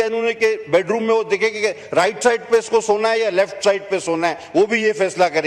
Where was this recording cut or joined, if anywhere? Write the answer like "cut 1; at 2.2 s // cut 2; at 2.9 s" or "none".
none